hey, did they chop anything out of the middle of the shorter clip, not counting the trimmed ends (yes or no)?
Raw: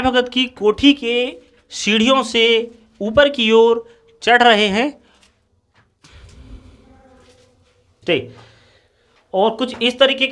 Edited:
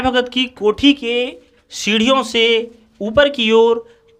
no